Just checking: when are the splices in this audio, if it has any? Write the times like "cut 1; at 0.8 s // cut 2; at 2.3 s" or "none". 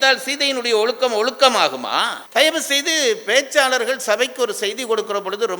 cut 1; at 2.2 s